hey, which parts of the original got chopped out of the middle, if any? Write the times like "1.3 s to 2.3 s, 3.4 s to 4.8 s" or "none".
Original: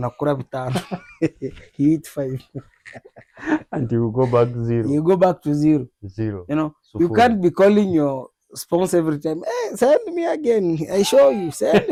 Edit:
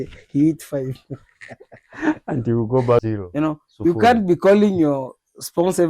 4.5 s to 6.2 s